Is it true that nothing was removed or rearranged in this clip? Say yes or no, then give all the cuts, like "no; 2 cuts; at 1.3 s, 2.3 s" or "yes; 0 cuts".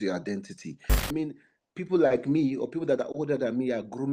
no; 1 cut; at 1.0 s